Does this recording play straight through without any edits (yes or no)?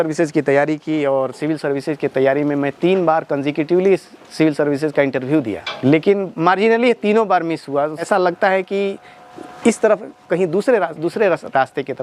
no